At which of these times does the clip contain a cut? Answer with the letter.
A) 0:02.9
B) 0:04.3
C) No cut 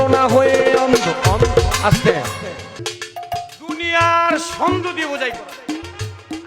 A